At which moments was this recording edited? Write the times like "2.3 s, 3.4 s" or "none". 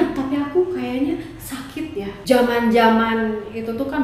2.2 s